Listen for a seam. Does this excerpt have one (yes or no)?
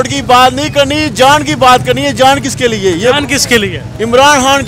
no